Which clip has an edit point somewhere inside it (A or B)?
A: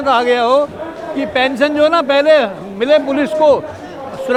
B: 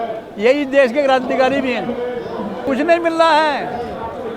B